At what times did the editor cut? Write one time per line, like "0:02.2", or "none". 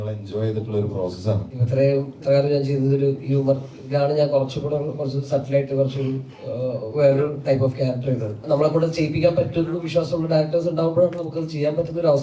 0:01.5
0:08.4